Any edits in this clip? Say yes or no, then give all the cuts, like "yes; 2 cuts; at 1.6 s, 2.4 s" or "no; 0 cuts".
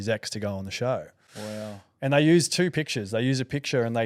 no; 0 cuts